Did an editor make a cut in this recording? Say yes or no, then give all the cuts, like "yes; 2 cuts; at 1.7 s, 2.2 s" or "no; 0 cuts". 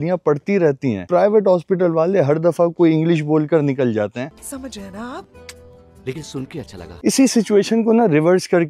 yes; 1 cut; at 7.0 s